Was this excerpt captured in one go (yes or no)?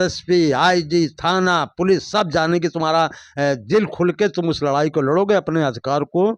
yes